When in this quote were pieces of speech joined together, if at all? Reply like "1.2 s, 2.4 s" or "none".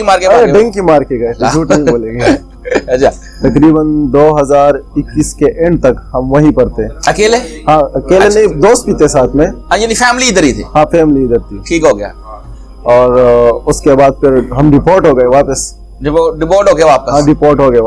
none